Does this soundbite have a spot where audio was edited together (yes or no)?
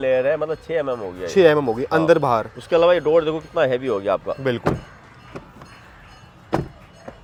no